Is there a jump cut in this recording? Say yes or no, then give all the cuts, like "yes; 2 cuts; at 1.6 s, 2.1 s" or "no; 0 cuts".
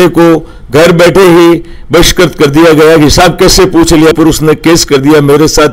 no; 0 cuts